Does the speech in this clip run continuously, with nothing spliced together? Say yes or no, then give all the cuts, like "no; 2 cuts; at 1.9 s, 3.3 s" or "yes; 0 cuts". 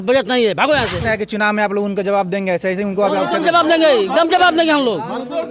no; 1 cut; at 1.0 s